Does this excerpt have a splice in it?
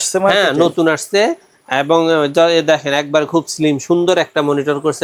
no; 0 cuts

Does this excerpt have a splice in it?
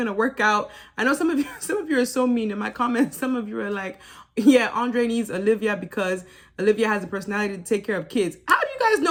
no; 0 cuts

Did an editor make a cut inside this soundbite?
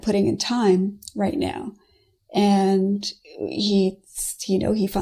no; 0 cuts

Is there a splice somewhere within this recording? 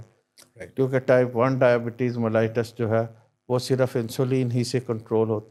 no; 0 cuts

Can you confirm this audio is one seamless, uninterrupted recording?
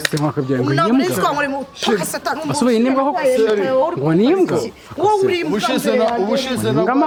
yes; 0 cuts

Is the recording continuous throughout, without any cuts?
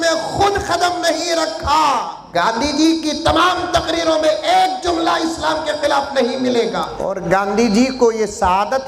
no; 2 cuts; at 2.2 s, 7.0 s

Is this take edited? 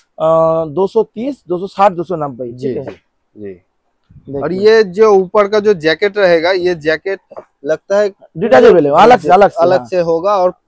no; 0 cuts

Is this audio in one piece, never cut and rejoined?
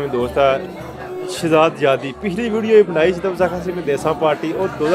yes; 0 cuts

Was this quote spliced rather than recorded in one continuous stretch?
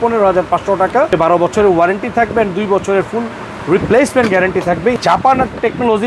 yes; 2 cuts; at 1.1 s, 5.0 s

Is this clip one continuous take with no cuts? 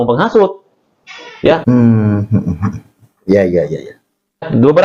yes; 0 cuts

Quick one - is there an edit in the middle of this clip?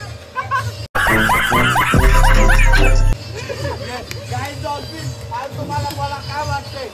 no; 0 cuts

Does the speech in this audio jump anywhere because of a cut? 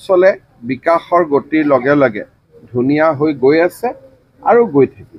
no; 0 cuts

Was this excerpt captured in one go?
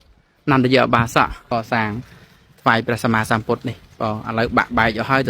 no; 1 cut; at 1.4 s

